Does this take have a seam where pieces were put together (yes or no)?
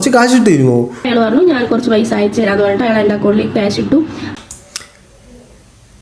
yes